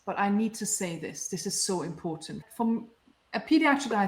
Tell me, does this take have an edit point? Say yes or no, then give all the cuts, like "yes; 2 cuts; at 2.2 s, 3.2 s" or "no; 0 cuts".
no; 0 cuts